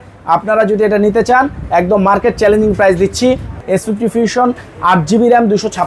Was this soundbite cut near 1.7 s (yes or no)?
no